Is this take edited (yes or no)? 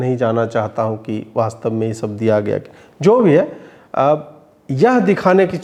no